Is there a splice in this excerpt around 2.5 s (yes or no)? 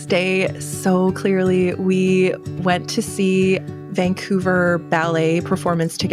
no